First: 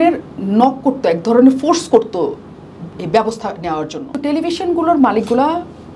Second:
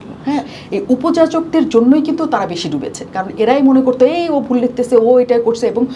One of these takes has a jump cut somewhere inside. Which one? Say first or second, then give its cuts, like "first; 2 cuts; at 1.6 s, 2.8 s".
first; 1 cut; at 4.2 s